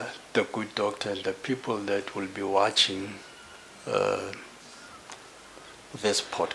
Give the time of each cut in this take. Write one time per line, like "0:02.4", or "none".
none